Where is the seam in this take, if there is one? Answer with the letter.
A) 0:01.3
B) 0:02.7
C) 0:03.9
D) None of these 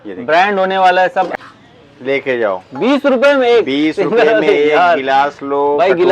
A